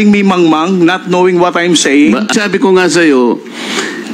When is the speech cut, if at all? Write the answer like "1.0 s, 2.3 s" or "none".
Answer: 2.3 s